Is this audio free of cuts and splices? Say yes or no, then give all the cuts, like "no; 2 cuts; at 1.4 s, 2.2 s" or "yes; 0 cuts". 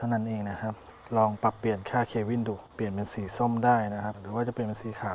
no; 2 cuts; at 2.7 s, 4.2 s